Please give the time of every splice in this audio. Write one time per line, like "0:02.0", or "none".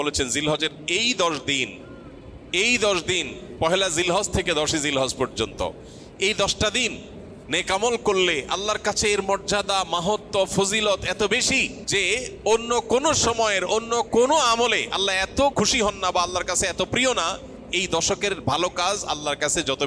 0:11.8
0:15.5